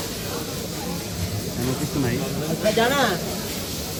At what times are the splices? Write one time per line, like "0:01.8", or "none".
none